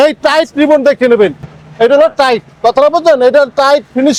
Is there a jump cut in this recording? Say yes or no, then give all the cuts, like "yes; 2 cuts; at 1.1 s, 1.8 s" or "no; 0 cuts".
no; 0 cuts